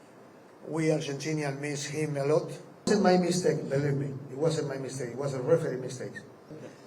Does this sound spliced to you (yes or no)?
yes